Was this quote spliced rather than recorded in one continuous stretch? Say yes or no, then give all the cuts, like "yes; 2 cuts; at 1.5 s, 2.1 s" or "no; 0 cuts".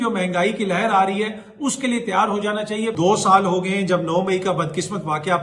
yes; 1 cut; at 2.9 s